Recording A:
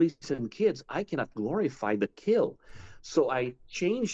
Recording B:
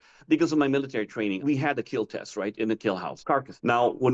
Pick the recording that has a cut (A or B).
B